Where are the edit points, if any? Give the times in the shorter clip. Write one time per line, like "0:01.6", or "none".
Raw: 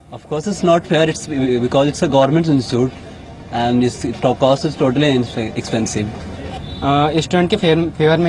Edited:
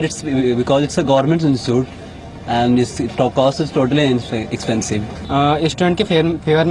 0:05.2